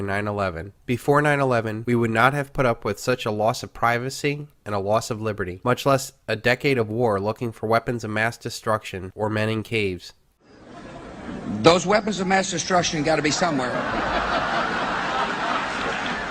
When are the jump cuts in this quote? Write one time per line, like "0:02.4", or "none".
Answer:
none